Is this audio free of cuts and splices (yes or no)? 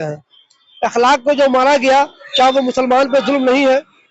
yes